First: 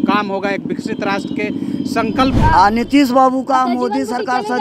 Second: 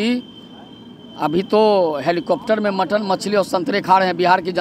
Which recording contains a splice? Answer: first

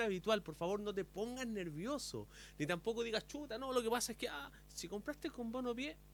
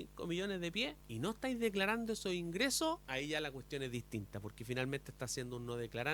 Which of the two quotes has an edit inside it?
second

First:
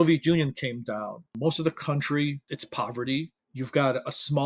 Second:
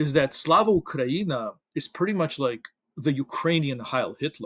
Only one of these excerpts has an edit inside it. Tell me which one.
first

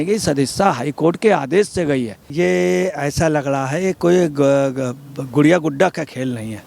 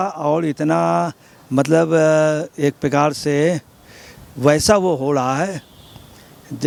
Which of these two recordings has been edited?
first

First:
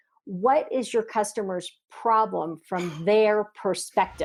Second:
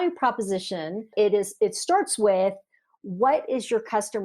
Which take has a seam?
second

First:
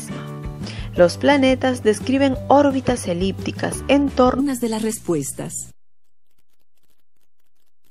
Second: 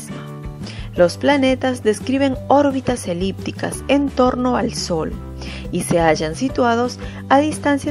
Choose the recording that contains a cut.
second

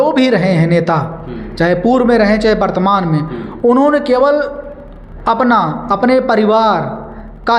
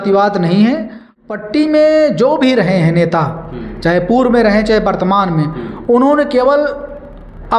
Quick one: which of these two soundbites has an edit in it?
second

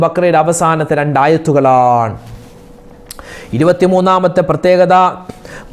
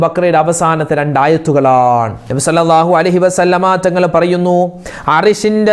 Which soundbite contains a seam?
second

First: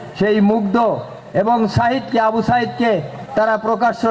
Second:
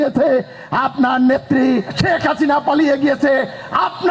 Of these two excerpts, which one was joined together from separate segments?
second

